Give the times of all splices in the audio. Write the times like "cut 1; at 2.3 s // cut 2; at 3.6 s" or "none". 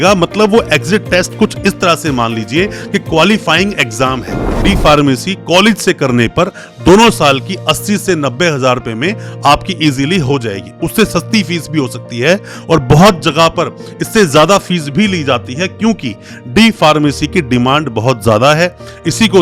cut 1; at 4.6 s